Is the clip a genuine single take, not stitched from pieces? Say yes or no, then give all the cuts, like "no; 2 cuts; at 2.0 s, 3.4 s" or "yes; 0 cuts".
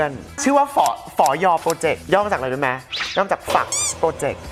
yes; 0 cuts